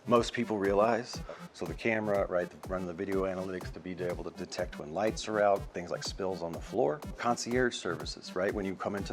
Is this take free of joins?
no; 3 cuts; at 1.2 s, 5.7 s, 7.2 s

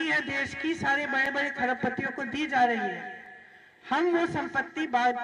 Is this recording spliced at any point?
no; 0 cuts

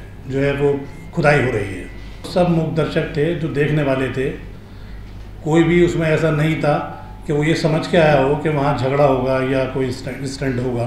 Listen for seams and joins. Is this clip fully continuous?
no; 1 cut; at 2.3 s

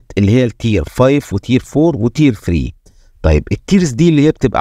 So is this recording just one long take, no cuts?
yes; 0 cuts

